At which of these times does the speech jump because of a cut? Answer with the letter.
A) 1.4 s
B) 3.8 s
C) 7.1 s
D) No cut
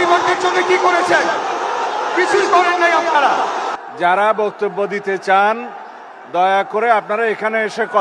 B